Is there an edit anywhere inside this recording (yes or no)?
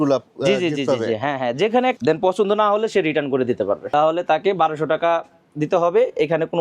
yes